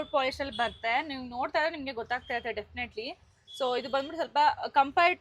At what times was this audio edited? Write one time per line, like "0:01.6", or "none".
none